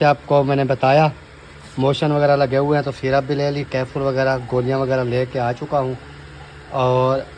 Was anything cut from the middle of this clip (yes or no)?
no